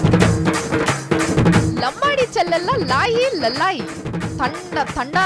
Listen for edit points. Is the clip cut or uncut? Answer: uncut